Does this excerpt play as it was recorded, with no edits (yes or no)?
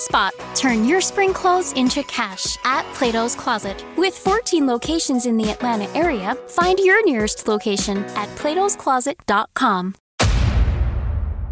no